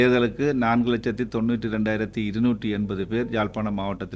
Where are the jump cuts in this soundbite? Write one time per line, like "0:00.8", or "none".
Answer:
none